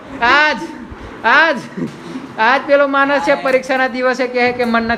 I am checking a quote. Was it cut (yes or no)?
no